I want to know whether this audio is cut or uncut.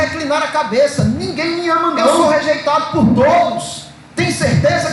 cut